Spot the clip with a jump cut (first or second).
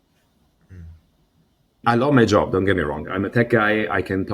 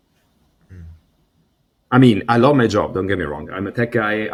first